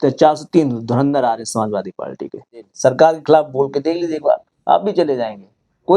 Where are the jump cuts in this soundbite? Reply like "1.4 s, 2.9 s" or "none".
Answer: 2.7 s